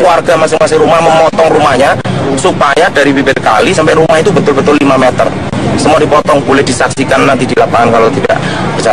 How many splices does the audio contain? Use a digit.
1